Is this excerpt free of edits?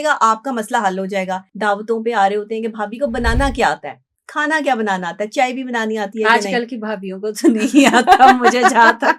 no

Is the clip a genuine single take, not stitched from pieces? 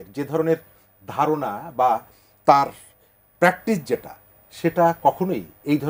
yes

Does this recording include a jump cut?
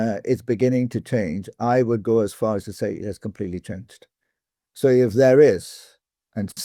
no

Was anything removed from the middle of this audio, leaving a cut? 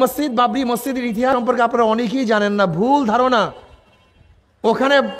yes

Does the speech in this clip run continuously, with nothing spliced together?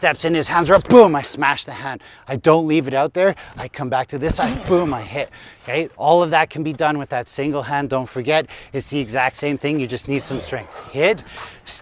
yes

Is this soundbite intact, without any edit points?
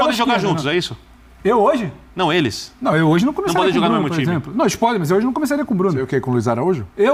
yes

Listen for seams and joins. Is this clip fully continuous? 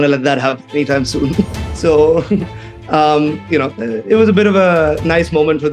no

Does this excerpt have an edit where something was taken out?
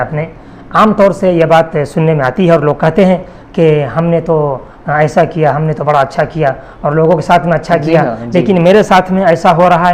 no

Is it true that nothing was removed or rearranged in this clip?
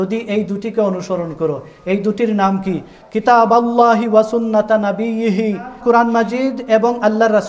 no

